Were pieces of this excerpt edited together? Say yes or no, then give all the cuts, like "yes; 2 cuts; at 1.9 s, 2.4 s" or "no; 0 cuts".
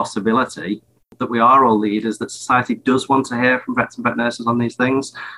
yes; 1 cut; at 1.2 s